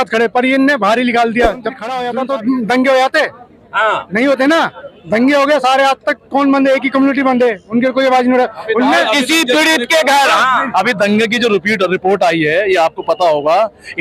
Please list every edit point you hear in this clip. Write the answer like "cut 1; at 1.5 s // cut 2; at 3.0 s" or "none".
cut 1; at 2.0 s